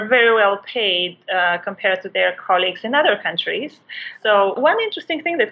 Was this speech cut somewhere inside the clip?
yes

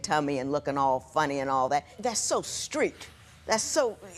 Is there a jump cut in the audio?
yes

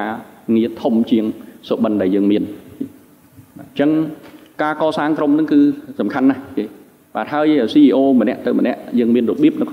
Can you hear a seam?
no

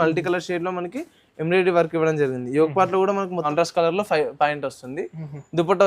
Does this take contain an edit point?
yes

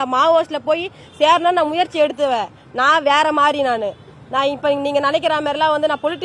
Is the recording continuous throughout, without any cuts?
yes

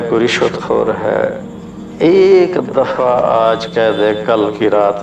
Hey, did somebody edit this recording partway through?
no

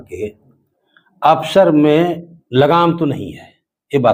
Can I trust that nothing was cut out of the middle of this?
yes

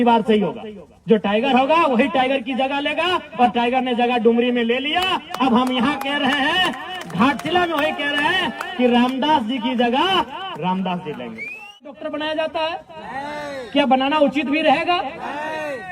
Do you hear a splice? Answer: yes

